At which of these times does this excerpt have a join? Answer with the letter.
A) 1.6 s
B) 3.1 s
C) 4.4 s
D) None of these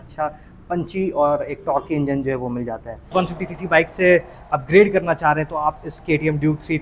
B